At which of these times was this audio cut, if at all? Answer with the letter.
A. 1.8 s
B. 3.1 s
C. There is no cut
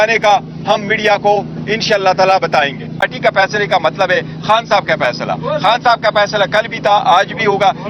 B